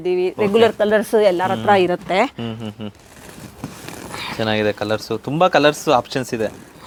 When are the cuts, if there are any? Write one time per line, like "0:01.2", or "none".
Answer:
none